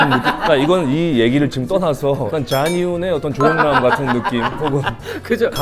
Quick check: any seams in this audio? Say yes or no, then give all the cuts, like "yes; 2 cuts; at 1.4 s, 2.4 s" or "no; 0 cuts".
yes; 1 cut; at 2.3 s